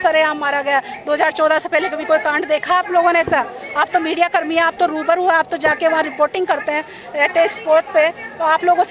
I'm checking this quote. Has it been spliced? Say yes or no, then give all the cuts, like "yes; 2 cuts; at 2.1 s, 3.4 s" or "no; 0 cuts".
no; 0 cuts